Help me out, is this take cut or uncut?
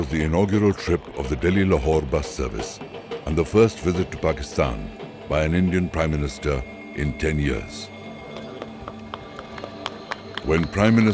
uncut